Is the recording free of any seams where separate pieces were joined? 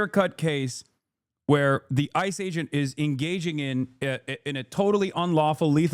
yes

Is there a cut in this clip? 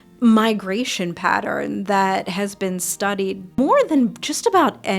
yes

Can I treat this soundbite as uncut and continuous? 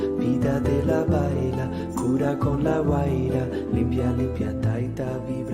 yes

